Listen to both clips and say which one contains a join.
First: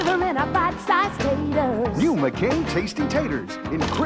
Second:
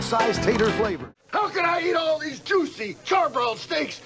second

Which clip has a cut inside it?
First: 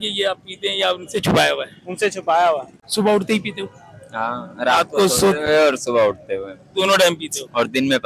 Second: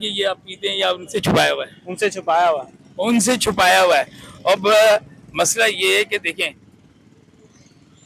first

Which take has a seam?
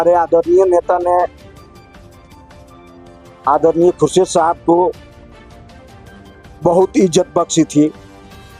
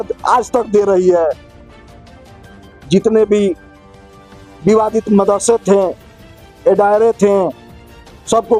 first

